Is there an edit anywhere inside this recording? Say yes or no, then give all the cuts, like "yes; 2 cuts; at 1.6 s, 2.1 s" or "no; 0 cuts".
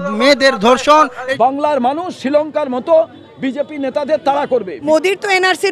yes; 2 cuts; at 1.2 s, 4.7 s